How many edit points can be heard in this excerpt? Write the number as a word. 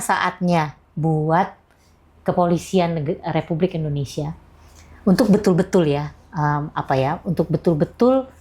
zero